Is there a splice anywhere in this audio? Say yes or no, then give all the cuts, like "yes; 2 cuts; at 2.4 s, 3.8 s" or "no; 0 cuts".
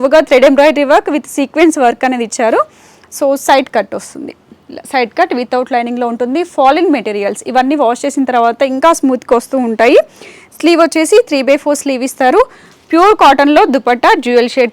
no; 0 cuts